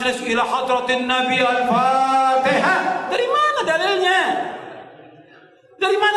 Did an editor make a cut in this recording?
no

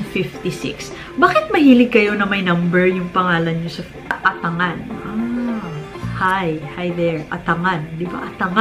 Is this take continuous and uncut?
no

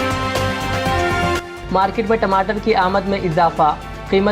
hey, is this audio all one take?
no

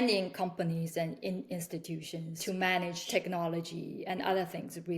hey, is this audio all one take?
no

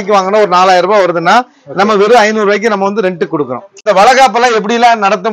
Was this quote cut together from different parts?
yes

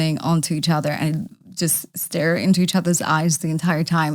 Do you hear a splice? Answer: no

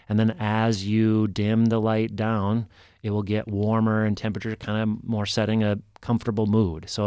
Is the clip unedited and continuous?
yes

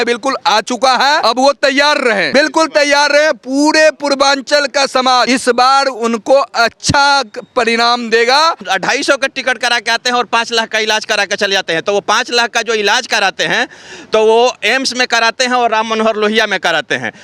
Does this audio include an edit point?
yes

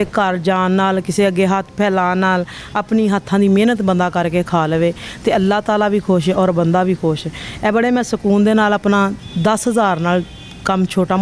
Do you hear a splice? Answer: no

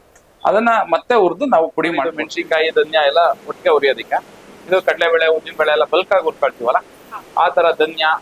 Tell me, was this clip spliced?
yes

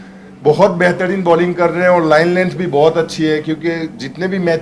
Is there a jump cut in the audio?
no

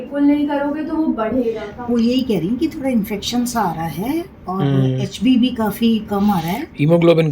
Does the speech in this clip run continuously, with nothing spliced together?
no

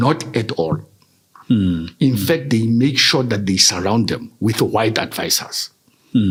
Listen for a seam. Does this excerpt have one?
no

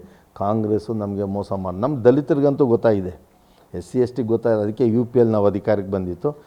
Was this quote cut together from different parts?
no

